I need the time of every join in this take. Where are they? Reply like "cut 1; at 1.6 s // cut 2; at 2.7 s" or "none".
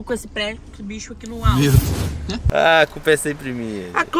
cut 1; at 2.4 s